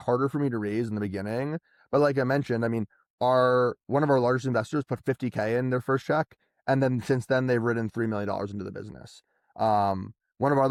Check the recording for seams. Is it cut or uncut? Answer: uncut